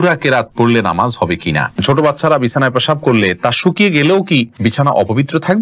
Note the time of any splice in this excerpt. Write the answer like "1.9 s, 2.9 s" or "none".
1.8 s, 4.5 s